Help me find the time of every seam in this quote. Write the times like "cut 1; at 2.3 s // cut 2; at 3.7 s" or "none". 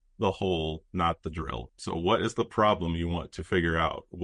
cut 1; at 1.7 s